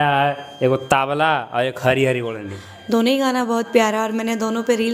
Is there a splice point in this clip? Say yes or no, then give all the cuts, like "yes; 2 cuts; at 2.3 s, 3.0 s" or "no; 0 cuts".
no; 0 cuts